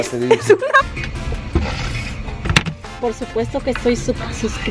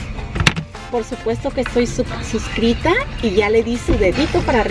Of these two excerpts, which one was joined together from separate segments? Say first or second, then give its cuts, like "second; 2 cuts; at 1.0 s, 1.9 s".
first; 1 cut; at 0.9 s